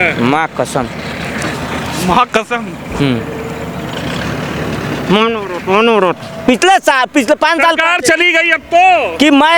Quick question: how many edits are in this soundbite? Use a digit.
1